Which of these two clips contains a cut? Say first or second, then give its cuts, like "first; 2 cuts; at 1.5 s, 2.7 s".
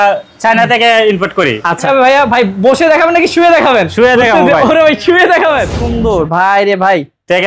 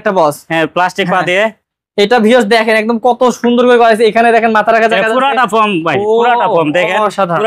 first; 2 cuts; at 1.8 s, 5.8 s